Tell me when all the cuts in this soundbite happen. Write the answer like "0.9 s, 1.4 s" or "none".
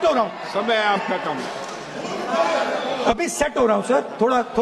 none